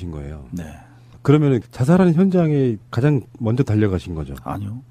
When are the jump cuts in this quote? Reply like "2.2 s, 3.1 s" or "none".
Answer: none